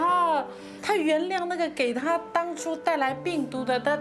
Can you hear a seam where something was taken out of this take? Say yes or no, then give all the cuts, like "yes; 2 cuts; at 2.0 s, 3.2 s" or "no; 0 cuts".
no; 0 cuts